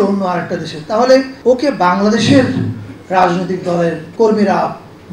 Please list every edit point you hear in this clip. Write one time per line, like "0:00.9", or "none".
0:01.3
0:04.0

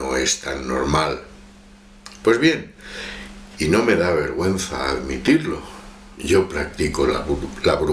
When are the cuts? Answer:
none

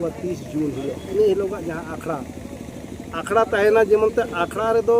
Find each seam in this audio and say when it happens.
0:01.0

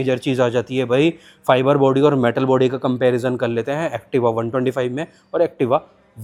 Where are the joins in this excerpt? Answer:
none

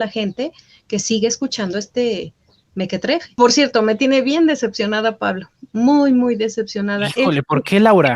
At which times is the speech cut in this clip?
0:03.3

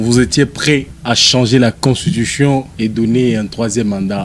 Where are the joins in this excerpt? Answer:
0:00.9
0:02.7

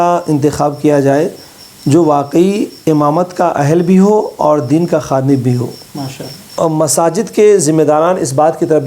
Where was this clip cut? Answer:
0:06.4

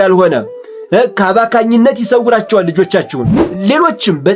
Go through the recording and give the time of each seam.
0:03.4

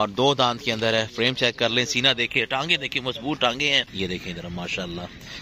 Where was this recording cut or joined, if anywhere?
0:03.9

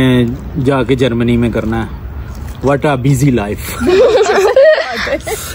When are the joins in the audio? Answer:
none

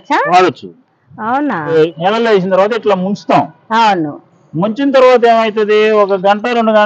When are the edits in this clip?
0:01.7

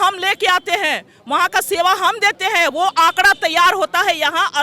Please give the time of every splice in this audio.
none

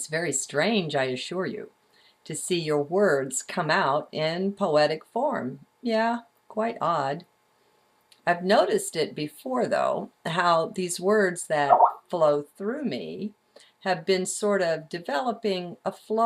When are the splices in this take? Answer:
0:12.0

